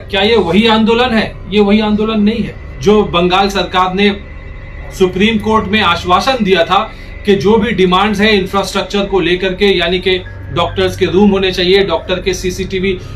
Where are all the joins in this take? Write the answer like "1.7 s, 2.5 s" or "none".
2.6 s